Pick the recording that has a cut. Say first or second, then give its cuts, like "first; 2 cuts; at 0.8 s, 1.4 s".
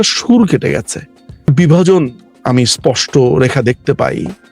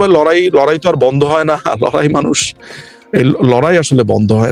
first; 1 cut; at 1.5 s